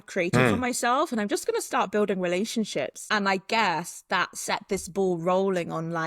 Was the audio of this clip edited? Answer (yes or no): yes